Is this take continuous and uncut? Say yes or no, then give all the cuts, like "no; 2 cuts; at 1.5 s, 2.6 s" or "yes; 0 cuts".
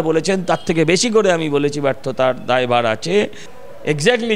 no; 1 cut; at 3.5 s